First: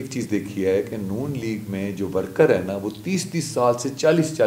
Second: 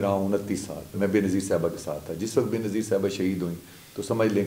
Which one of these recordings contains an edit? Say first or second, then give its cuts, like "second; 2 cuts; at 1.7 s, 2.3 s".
second; 1 cut; at 0.9 s